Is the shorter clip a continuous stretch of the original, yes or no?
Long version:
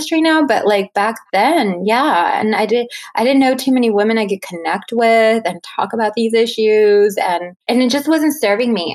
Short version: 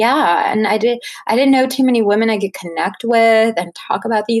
yes